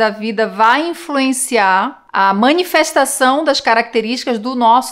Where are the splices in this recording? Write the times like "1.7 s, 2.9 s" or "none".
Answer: none